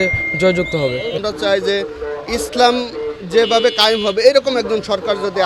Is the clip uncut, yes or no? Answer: no